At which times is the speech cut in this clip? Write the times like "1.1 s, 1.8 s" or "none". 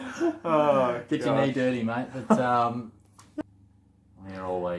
3.4 s